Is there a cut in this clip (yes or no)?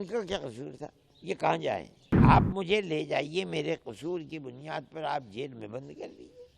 yes